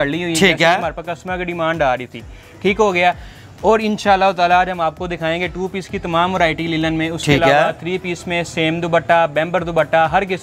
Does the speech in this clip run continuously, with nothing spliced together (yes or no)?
yes